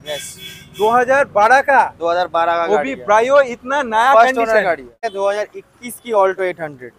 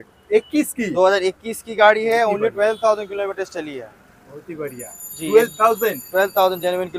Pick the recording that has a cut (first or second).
first